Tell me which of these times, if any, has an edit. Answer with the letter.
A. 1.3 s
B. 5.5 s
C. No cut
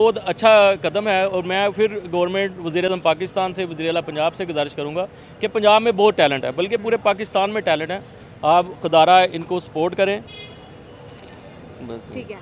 C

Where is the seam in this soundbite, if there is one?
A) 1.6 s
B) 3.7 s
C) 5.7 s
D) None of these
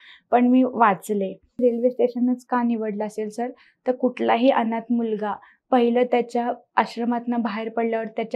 A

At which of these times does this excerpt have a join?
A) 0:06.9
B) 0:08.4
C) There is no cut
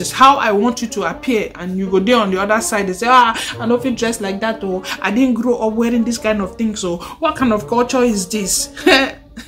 C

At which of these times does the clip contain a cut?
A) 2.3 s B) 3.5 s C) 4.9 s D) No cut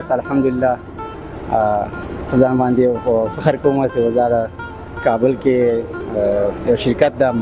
D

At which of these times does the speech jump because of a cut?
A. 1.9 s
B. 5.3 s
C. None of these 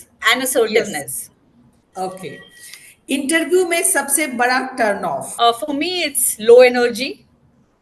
B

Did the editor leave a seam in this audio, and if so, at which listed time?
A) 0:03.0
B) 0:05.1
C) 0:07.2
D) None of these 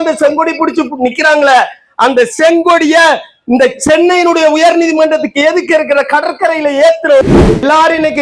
C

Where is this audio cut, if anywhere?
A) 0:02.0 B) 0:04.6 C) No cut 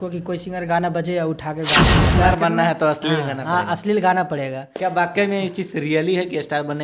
A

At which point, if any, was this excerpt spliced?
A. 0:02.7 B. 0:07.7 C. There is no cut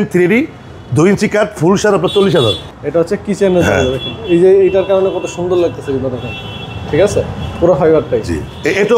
A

